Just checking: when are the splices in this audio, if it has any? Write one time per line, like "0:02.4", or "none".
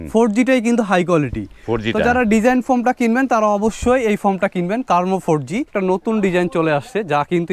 0:05.7